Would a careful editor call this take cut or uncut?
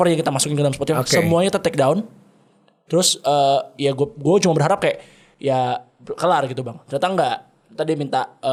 uncut